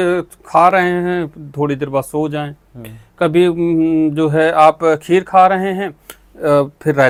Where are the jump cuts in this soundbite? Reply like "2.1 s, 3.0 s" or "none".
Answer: none